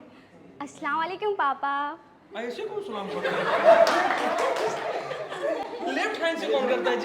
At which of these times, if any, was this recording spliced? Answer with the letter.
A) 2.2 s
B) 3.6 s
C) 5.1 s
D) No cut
D